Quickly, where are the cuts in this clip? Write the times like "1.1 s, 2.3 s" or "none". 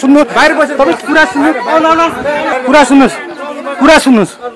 2.6 s

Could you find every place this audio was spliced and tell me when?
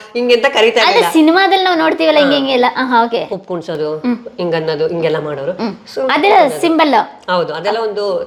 none

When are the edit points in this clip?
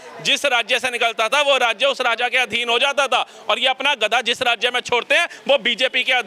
none

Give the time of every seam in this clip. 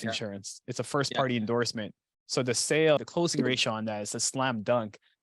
3.0 s

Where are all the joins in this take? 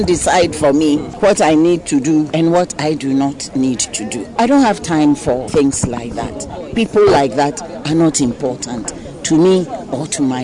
1.1 s, 2.3 s, 4.4 s, 5.5 s

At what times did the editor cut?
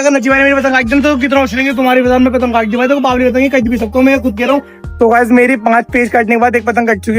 4.8 s

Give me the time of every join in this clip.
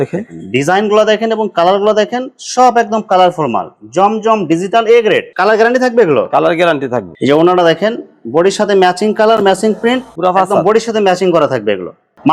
none

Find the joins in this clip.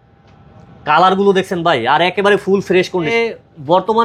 3.1 s

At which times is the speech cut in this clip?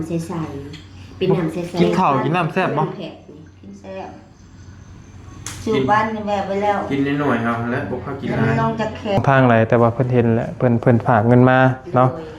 9.2 s

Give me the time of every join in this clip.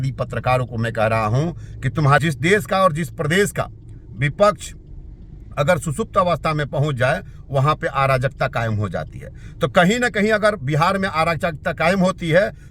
2.2 s

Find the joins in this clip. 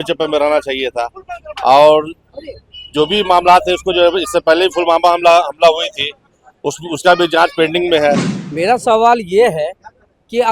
8.3 s

